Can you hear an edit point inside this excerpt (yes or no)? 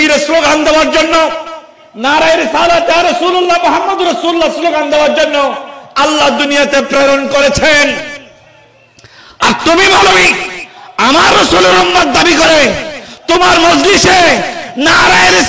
no